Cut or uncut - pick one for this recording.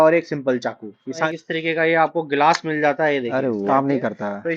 cut